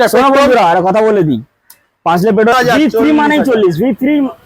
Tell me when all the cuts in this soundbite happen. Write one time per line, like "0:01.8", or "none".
0:02.5

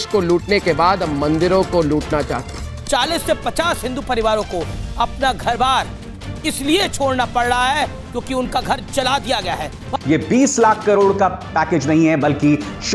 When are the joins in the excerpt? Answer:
0:02.7
0:09.8

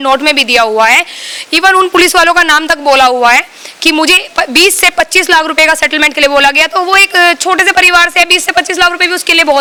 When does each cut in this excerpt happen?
none

